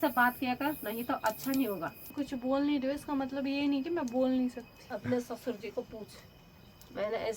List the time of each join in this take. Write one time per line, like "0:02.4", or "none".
0:02.1
0:04.7